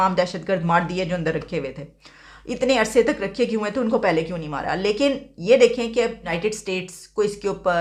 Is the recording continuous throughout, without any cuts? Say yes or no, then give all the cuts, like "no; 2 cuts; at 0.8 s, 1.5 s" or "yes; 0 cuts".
yes; 0 cuts